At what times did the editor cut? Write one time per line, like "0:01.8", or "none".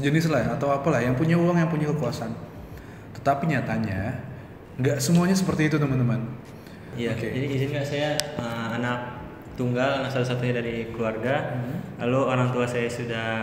0:06.9